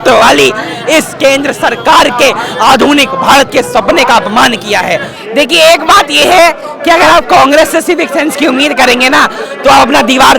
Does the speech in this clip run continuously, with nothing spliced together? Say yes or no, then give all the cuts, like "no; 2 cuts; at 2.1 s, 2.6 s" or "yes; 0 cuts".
no; 1 cut; at 5.1 s